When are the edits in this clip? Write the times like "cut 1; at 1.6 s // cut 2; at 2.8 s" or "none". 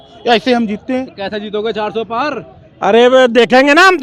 none

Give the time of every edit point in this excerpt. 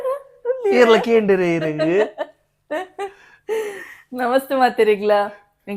none

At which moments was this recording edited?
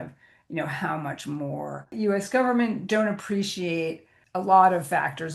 cut 1; at 1.9 s

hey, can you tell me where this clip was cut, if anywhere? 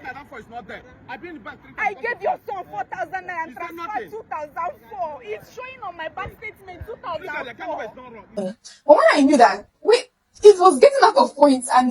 cut 1; at 8.4 s

